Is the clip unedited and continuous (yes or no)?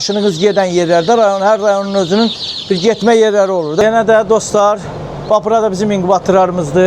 no